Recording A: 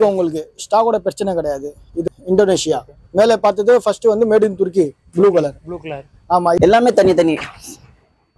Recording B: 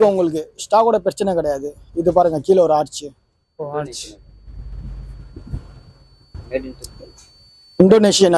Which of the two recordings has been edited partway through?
A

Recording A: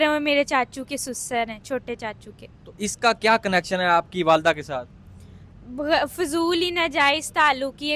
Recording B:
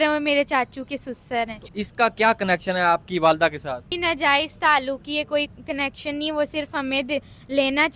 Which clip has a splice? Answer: B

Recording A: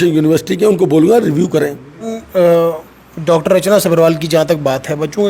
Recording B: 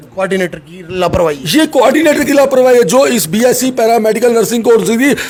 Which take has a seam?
A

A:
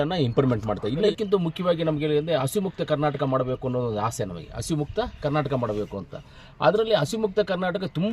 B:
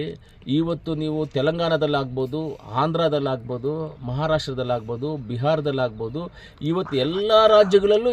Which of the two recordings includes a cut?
A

